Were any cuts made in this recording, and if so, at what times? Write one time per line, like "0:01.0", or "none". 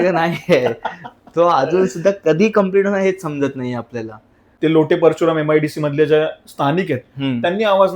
0:04.4